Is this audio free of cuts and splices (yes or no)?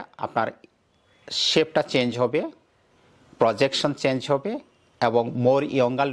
yes